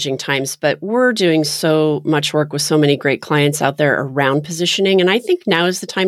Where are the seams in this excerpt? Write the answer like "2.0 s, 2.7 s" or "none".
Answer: none